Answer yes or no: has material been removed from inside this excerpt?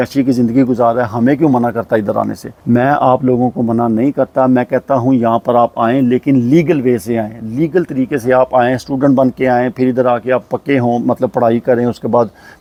no